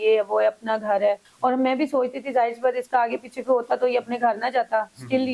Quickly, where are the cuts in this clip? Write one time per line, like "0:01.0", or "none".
0:01.3